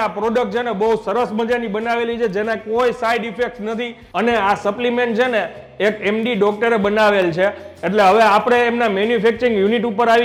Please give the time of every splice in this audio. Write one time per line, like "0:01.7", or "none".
none